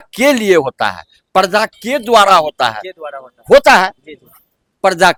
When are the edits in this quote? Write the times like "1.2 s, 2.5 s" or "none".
none